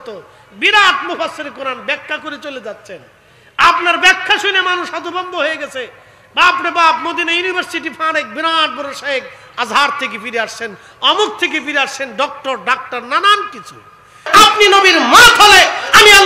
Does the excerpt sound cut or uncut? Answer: cut